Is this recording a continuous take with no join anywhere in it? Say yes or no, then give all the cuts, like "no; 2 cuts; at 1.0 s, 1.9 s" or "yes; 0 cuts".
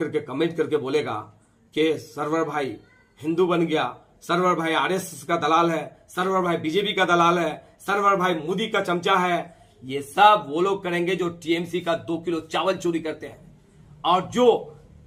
yes; 0 cuts